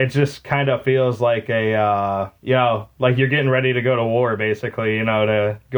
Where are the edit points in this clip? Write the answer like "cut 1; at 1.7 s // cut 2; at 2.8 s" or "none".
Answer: cut 1; at 2.3 s